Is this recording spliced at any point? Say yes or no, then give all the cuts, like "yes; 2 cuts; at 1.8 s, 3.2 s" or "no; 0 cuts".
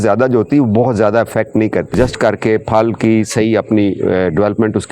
yes; 1 cut; at 1.9 s